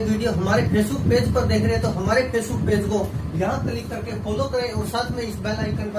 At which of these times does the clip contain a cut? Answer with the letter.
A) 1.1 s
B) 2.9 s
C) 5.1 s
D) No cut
D